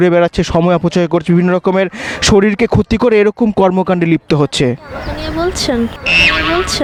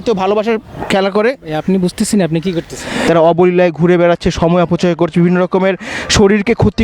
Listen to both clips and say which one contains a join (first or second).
second